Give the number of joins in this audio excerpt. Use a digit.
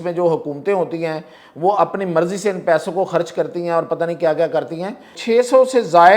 1